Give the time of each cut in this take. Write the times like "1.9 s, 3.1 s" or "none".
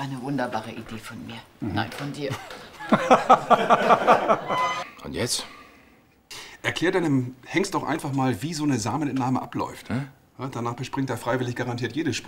none